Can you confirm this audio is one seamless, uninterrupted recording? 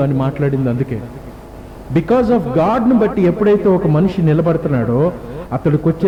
yes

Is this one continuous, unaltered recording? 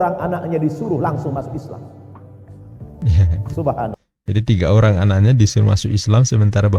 yes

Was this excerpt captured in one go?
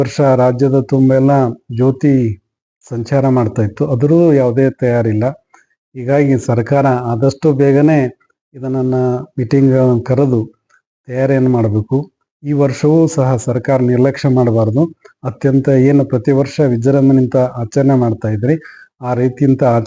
yes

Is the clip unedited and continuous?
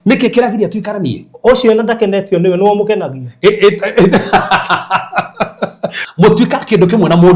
no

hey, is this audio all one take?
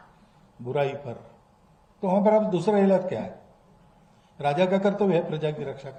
yes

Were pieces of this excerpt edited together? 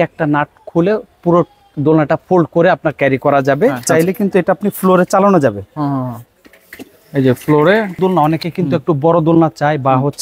yes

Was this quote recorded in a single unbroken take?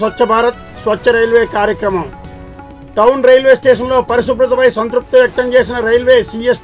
yes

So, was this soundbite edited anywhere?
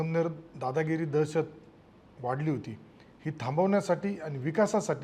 no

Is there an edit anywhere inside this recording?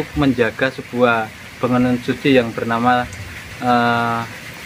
no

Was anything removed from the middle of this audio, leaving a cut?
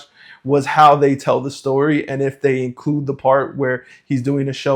no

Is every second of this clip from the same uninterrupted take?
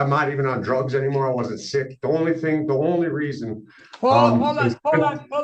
yes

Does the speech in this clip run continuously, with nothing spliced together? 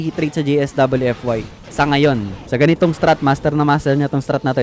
no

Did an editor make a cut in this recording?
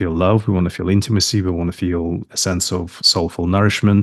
no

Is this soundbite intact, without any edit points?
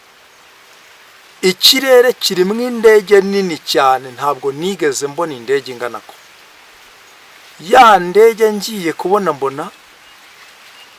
yes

